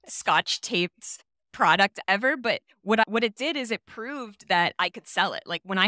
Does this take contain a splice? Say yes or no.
no